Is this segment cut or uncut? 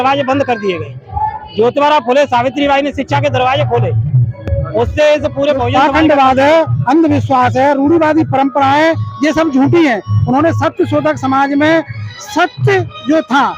cut